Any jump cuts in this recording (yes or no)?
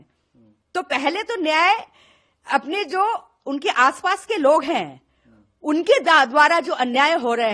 no